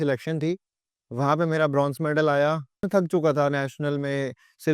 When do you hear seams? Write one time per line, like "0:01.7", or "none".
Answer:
0:02.9